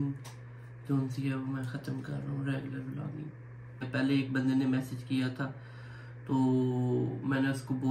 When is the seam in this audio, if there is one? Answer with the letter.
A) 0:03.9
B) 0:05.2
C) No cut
A